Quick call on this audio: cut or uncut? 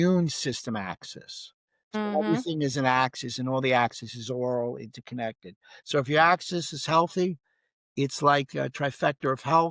uncut